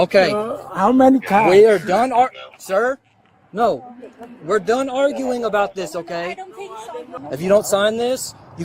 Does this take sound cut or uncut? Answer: cut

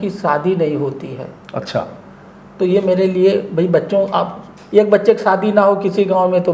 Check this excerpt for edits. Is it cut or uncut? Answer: uncut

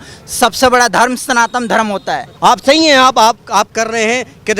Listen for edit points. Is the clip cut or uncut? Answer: cut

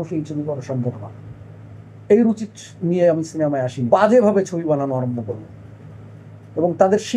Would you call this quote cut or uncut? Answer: cut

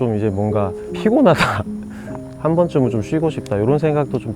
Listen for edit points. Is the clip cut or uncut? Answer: cut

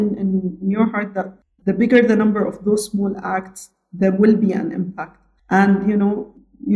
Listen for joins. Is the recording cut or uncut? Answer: cut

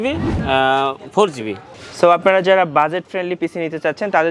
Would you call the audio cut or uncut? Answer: cut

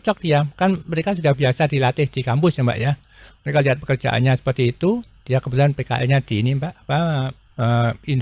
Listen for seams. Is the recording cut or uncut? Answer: uncut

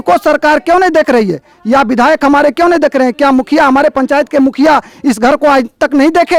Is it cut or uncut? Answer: uncut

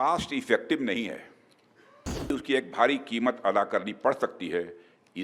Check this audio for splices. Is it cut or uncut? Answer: cut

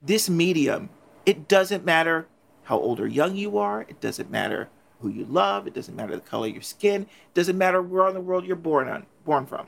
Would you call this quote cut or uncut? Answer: cut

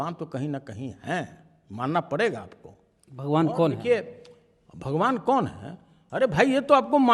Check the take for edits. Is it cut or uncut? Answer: uncut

